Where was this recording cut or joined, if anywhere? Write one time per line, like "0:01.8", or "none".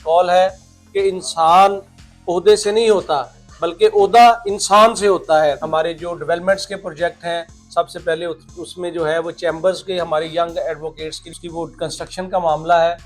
0:05.6
0:11.4